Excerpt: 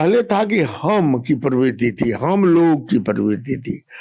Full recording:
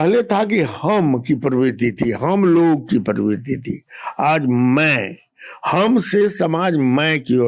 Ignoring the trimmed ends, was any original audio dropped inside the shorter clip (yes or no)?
no